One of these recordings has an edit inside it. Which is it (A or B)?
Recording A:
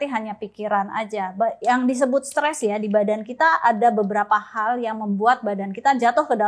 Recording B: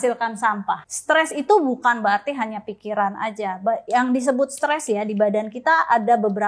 B